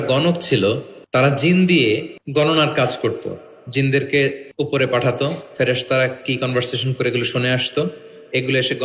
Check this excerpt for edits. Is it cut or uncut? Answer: cut